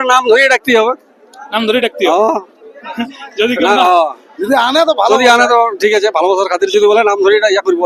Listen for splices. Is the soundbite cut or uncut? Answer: uncut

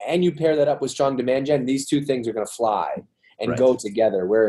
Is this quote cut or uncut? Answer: uncut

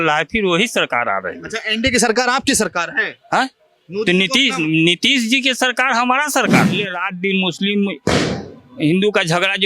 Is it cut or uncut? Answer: cut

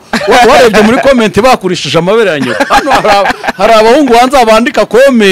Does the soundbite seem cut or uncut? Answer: uncut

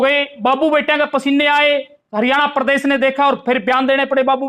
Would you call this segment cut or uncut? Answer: uncut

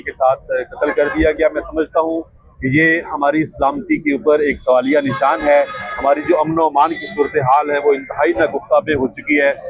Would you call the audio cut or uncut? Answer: uncut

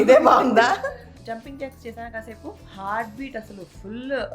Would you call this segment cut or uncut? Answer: cut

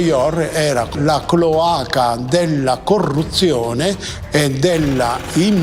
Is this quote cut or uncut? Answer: cut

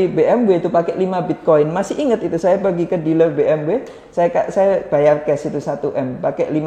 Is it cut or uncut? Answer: uncut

